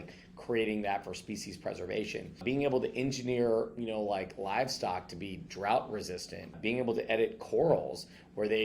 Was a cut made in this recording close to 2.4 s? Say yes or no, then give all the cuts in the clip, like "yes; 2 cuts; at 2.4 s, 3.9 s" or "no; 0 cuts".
yes; 2 cuts; at 2.4 s, 6.6 s